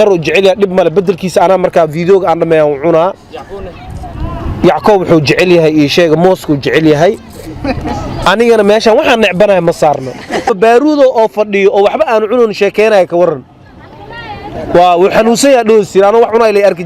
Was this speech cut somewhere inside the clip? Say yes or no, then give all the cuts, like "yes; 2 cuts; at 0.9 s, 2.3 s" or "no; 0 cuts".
yes; 1 cut; at 10.5 s